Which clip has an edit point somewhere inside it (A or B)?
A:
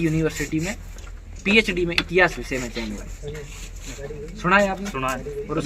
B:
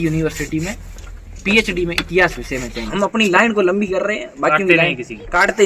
B